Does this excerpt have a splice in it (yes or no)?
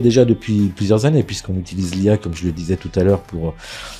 no